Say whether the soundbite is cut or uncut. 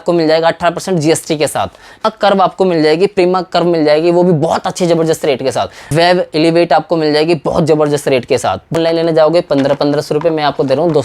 cut